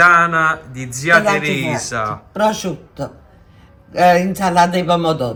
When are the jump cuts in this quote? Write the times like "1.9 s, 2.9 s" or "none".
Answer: none